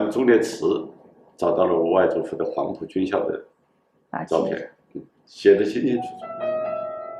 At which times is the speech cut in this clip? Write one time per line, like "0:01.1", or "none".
0:06.2